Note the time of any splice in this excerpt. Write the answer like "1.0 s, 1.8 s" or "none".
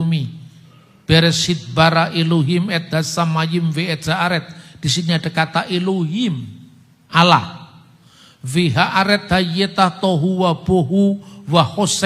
none